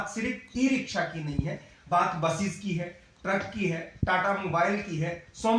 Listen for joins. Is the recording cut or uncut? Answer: uncut